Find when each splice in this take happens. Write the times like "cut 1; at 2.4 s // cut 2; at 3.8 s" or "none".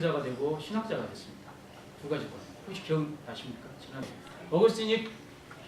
cut 1; at 4.2 s